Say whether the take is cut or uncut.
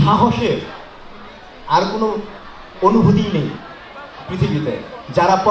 uncut